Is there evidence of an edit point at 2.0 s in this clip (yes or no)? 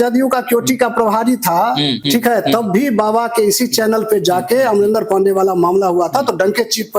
yes